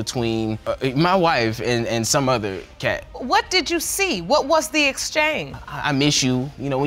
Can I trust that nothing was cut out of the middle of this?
yes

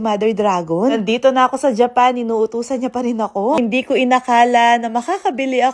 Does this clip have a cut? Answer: yes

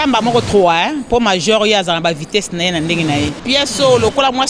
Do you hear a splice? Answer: yes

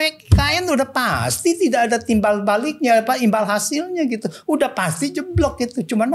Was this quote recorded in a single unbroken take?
yes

